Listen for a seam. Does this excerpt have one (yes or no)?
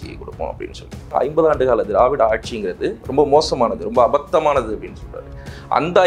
yes